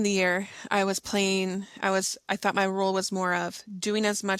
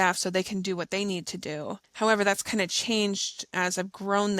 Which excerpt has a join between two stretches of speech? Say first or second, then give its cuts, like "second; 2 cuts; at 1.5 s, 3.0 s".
second; 2 cuts; at 1.8 s, 3.4 s